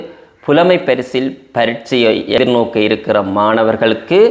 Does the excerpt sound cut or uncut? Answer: uncut